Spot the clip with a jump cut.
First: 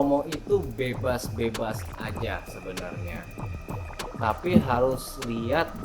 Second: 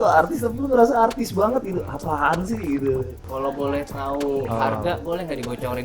second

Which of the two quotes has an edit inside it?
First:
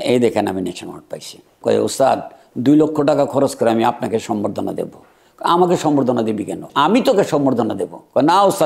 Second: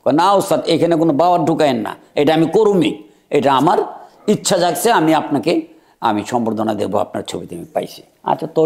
first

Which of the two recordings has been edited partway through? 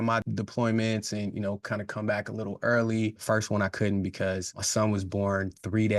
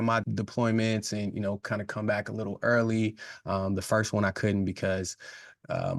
first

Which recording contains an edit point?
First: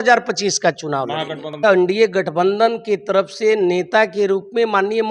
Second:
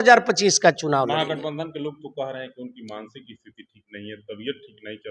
first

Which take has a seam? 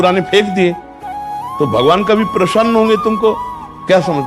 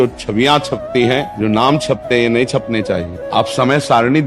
second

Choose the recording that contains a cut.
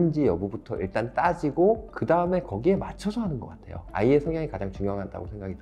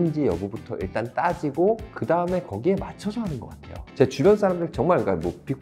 second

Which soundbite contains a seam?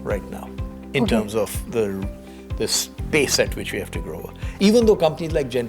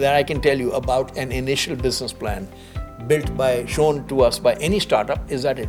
first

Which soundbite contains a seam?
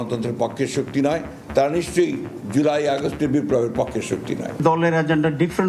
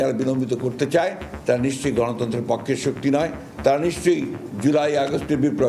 first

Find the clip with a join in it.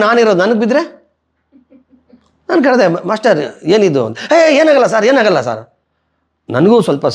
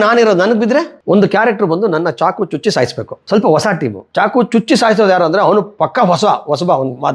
second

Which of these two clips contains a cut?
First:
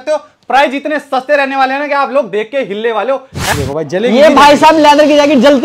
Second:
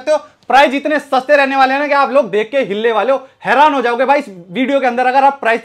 first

